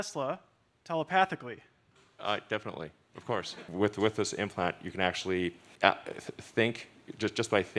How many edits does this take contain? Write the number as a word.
two